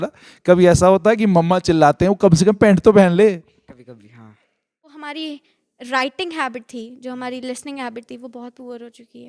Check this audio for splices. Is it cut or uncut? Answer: cut